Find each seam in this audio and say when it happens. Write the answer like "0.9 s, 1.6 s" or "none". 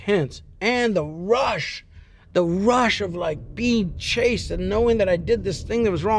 none